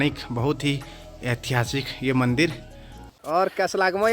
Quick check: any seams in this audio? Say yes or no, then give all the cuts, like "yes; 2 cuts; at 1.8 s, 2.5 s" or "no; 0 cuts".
yes; 1 cut; at 3.1 s